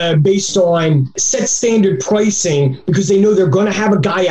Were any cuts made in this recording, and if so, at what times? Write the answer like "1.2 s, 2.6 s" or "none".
none